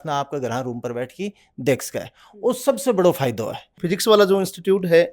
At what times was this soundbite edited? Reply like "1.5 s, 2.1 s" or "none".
3.8 s